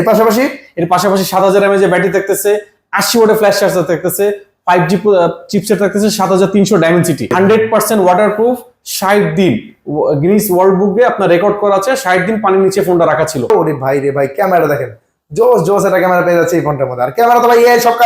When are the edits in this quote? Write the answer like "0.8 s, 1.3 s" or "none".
7.3 s, 13.5 s

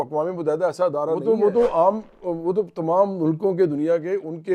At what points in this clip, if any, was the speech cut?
1.2 s

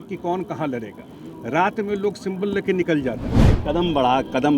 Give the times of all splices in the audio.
3.5 s

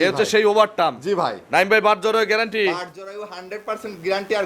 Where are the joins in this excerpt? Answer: none

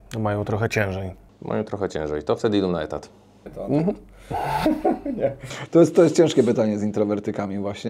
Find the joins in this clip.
none

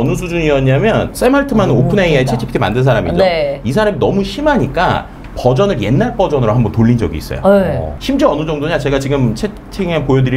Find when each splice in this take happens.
1.1 s, 7.9 s

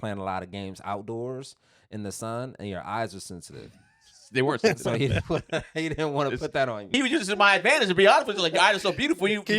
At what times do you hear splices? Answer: 6.9 s

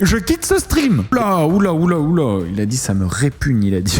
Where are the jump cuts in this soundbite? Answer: 1.1 s

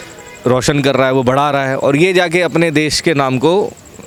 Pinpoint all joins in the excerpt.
none

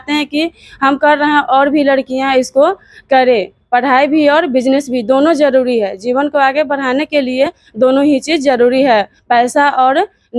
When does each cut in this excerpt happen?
none

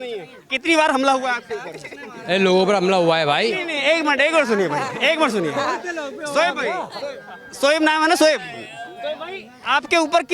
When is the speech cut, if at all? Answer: none

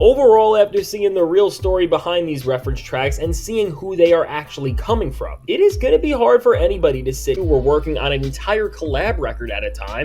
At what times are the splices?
7.4 s

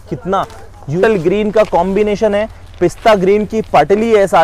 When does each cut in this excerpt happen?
1.0 s

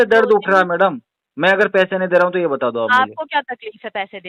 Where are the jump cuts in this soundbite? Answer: none

